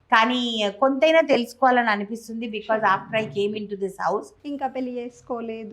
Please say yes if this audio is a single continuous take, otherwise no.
no